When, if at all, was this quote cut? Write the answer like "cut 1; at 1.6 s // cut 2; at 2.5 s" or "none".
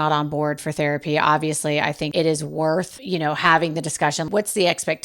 cut 1; at 2.1 s // cut 2; at 3.0 s // cut 3; at 4.3 s